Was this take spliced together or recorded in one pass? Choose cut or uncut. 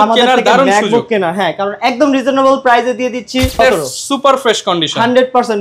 cut